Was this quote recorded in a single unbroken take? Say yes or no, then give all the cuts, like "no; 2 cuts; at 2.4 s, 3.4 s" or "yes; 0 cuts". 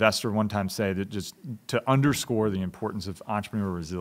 yes; 0 cuts